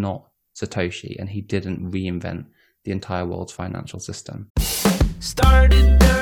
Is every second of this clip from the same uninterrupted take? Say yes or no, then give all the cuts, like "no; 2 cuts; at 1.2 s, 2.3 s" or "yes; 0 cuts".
no; 1 cut; at 4.4 s